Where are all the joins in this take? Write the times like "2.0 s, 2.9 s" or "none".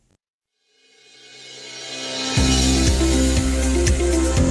1.1 s